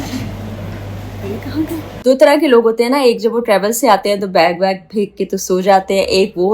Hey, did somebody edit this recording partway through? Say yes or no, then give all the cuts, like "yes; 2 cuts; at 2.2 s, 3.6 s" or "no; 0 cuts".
yes; 1 cut; at 1.9 s